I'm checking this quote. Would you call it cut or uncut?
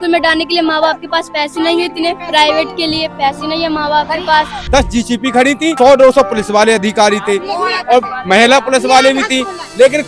cut